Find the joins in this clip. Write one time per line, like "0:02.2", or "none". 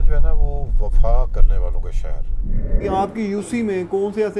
0:02.7